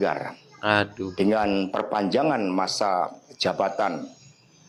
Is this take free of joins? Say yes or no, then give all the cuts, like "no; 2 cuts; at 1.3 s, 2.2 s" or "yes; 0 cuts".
yes; 0 cuts